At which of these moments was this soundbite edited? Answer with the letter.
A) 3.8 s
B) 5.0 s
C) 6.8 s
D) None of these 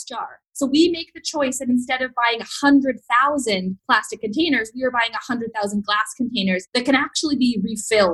A